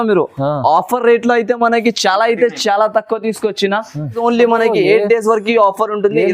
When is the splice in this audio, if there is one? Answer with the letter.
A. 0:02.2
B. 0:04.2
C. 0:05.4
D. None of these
B